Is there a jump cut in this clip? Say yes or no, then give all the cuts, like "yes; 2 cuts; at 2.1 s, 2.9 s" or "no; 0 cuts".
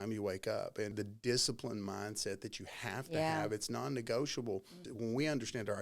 yes; 2 cuts; at 0.9 s, 4.8 s